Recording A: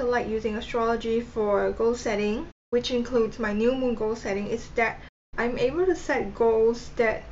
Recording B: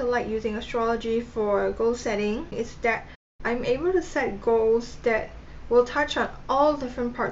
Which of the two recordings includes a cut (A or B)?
B